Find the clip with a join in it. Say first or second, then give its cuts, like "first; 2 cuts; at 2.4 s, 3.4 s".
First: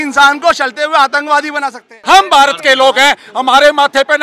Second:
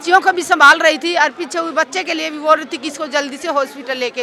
first; 1 cut; at 2.0 s